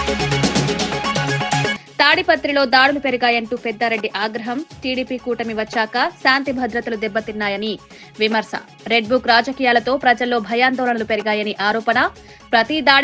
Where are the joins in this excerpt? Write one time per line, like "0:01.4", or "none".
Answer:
0:01.8